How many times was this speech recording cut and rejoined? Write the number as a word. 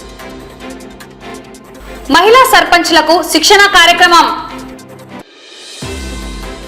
one